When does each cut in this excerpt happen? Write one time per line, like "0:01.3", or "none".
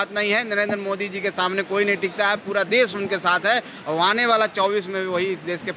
none